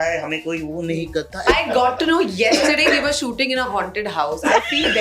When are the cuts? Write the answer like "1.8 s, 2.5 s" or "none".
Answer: 1.5 s